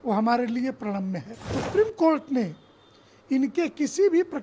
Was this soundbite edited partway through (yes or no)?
yes